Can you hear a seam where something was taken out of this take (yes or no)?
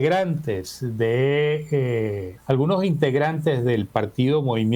yes